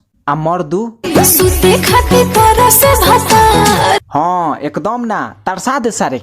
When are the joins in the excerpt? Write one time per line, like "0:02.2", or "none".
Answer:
none